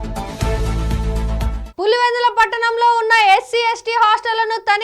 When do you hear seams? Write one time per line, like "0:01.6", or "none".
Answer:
0:01.6